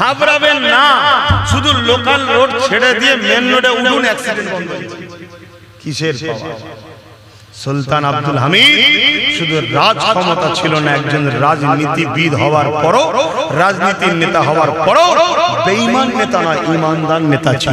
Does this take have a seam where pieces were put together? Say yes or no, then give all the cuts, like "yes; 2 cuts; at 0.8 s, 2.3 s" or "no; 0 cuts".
yes; 1 cut; at 4.7 s